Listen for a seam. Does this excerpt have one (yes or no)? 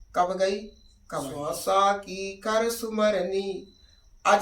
yes